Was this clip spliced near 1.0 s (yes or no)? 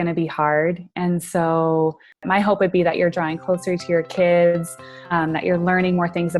no